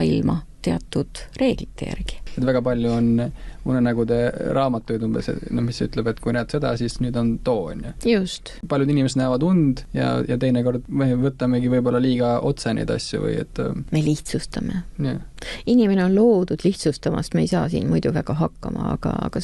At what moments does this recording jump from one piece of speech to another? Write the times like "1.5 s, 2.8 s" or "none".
2.2 s, 8.6 s, 9.9 s, 10.8 s, 13.8 s